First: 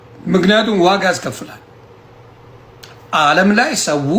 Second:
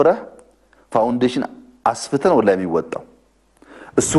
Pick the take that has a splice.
first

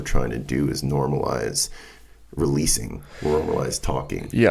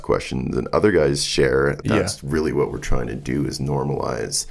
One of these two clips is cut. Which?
second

